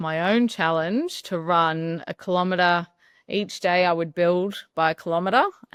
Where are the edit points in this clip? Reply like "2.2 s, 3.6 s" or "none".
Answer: none